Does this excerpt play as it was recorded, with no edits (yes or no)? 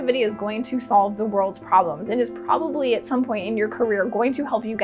yes